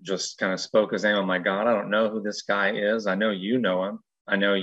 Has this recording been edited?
no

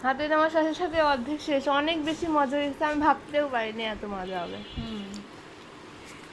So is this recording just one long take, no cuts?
yes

